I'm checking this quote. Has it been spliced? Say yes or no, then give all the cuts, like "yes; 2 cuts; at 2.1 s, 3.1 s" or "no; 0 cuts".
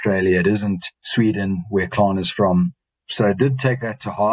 no; 0 cuts